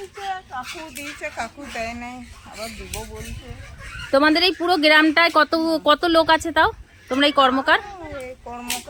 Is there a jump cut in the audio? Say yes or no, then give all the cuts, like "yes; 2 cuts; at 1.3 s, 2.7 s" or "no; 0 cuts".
no; 0 cuts